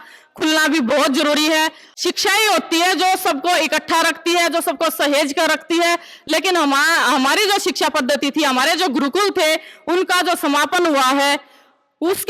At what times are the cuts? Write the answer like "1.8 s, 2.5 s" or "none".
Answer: 1.9 s